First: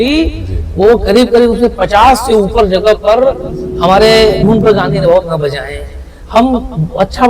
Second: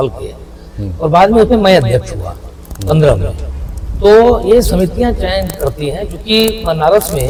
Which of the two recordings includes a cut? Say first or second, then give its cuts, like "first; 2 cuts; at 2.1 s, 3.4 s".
first; 1 cut; at 4.4 s